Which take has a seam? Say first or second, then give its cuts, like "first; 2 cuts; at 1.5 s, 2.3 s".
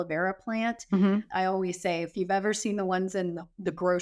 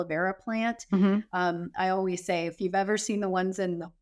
first; 1 cut; at 1.3 s